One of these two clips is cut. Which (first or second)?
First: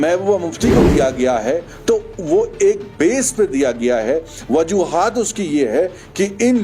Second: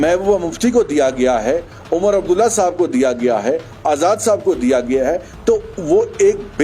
first